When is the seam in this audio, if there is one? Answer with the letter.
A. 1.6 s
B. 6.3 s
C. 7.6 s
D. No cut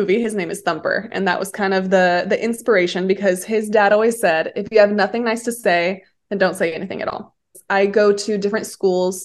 C